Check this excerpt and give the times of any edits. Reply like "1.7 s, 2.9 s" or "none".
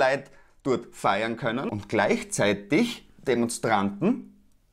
1.7 s